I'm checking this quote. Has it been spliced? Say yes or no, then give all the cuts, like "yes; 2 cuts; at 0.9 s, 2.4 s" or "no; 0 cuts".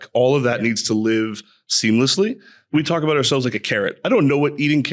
yes; 1 cut; at 2.7 s